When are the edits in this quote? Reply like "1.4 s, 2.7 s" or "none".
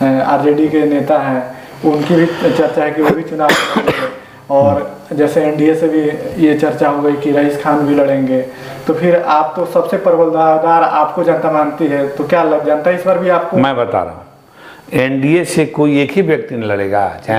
none